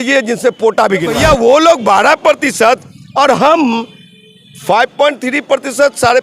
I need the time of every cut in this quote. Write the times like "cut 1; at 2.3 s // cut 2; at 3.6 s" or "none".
cut 1; at 1.1 s